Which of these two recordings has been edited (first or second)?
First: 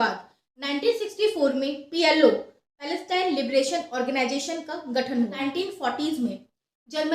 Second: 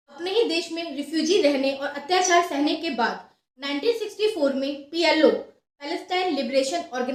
first